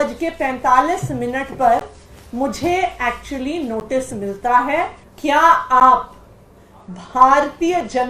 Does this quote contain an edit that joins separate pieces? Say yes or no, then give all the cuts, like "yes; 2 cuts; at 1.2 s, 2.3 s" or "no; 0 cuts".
yes; 1 cut; at 5.0 s